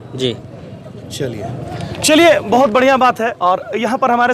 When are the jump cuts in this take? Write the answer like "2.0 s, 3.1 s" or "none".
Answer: none